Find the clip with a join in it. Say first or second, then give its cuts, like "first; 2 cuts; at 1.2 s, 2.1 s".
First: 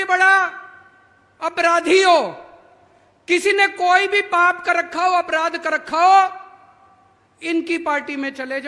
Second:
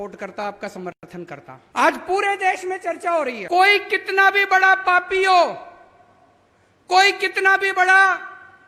second; 2 cuts; at 1.6 s, 3.4 s